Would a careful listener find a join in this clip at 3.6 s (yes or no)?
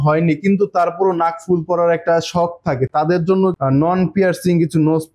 yes